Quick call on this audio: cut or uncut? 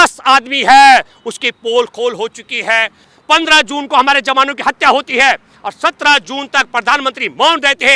cut